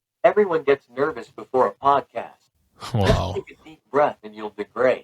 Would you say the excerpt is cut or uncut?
uncut